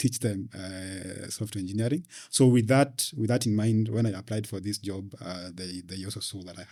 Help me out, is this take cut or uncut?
uncut